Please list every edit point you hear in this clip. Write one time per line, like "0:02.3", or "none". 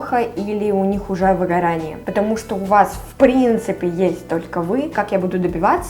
0:02.0
0:04.9